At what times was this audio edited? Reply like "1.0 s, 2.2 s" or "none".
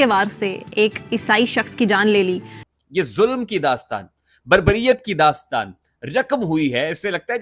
2.8 s